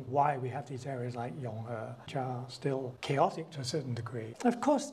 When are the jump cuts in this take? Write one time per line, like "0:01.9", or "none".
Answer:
none